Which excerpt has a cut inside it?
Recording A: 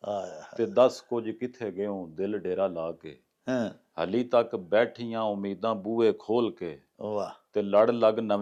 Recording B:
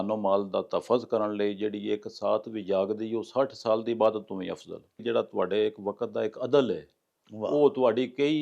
B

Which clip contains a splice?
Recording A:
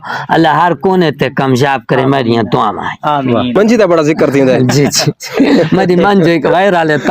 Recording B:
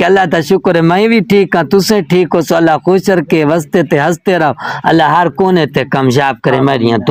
A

